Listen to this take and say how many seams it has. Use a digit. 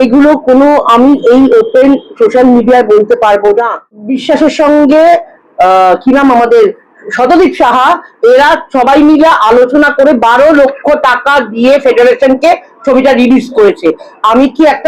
1